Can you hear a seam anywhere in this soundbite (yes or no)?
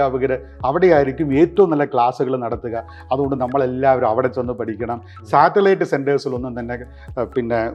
no